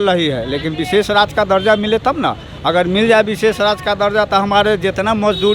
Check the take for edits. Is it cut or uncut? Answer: uncut